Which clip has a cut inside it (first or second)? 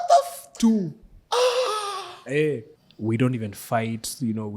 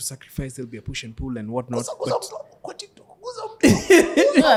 first